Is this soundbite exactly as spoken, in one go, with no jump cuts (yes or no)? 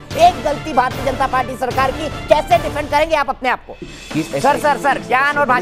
no